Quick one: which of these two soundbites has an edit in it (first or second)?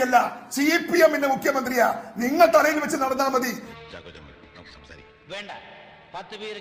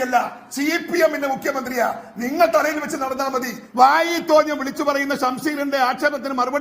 second